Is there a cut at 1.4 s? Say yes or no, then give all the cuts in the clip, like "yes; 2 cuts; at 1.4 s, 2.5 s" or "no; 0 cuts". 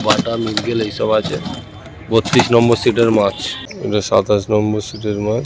no; 1 cut; at 4.0 s